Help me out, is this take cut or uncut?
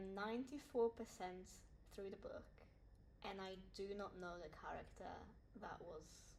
cut